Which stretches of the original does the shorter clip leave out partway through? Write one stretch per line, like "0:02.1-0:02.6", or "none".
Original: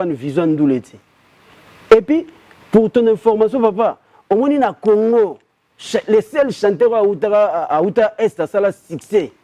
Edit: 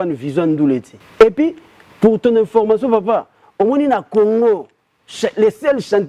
0:01.0-0:01.7